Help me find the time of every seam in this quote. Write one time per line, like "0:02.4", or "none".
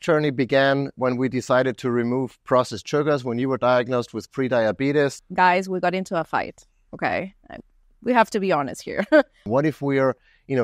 0:05.1
0:09.4